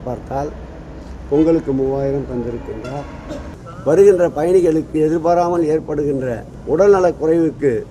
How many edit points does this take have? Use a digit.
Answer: 2